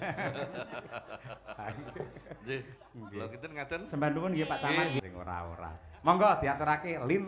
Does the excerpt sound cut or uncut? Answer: cut